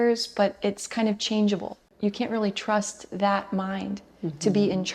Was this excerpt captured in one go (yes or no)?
no